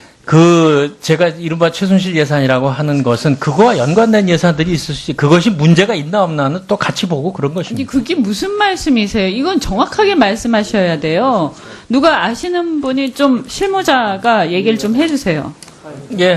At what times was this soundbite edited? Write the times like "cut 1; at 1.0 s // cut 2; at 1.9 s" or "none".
cut 1; at 15.0 s

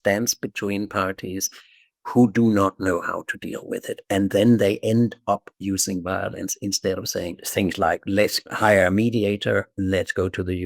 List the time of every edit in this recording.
cut 1; at 7.4 s // cut 2; at 8.5 s

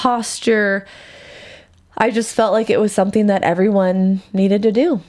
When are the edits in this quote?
none

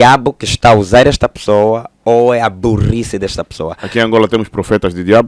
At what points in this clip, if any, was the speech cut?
cut 1; at 3.8 s

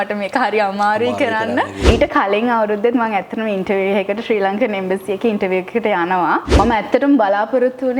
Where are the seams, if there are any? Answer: cut 1; at 1.9 s // cut 2; at 6.5 s

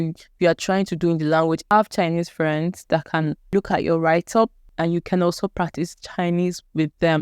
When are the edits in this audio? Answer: cut 1; at 1.6 s // cut 2; at 3.5 s // cut 3; at 4.6 s

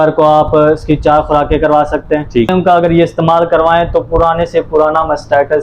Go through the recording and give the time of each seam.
cut 1; at 2.5 s

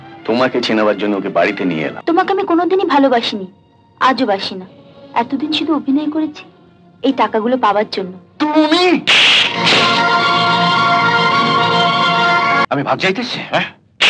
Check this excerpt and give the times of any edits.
cut 1; at 1.9 s // cut 2; at 12.6 s

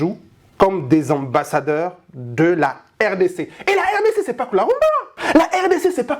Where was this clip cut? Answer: cut 1; at 5.1 s

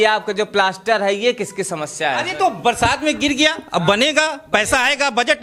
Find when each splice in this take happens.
none

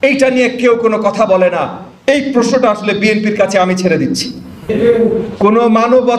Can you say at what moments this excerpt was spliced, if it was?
cut 1; at 4.7 s

